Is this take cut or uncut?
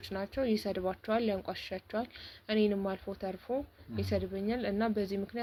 uncut